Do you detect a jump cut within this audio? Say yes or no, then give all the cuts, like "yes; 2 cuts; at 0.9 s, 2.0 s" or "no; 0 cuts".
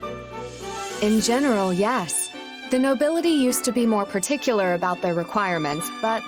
yes; 1 cut; at 1.0 s